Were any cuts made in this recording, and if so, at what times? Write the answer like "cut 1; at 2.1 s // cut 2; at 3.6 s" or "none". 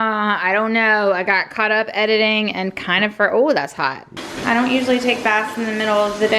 cut 1; at 4.2 s